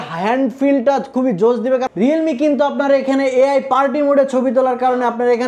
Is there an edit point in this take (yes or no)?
yes